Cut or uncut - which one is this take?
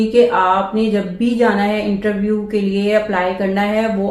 uncut